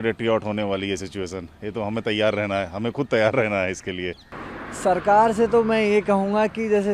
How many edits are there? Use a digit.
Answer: 1